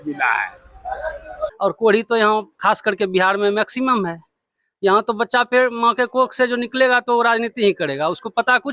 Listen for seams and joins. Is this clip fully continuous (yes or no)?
no